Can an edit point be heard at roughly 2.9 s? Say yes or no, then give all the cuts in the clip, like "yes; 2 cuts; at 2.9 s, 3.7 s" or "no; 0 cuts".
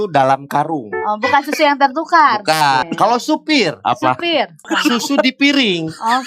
yes; 2 cuts; at 2.9 s, 4.7 s